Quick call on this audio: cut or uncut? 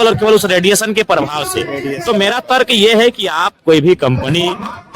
uncut